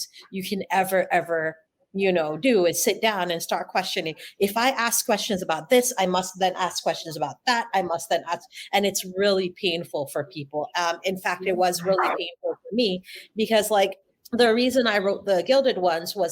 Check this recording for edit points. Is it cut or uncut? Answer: uncut